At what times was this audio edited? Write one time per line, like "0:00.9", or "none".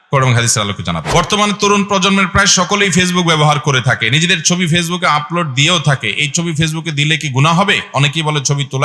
0:01.1